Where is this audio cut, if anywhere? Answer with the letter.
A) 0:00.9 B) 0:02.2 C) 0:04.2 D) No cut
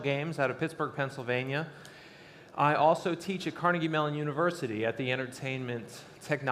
D